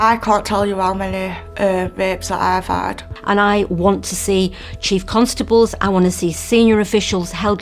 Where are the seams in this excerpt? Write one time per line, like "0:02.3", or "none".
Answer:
0:03.2